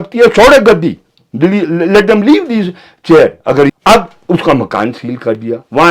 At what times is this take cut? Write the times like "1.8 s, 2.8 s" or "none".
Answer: 3.7 s